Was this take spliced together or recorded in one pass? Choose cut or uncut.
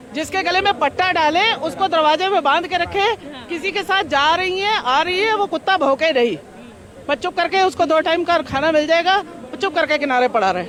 uncut